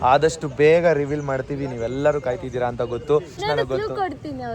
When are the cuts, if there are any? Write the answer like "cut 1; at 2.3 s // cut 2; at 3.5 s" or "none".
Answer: cut 1; at 3.4 s